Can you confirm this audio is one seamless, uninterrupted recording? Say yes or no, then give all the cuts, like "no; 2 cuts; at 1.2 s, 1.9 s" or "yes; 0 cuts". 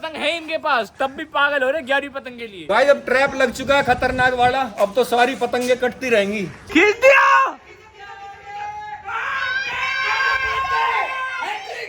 no; 2 cuts; at 2.5 s, 6.6 s